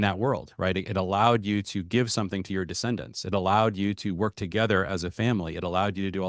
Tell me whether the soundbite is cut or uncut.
uncut